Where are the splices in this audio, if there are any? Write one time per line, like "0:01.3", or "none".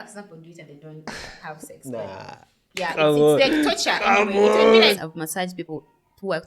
0:04.9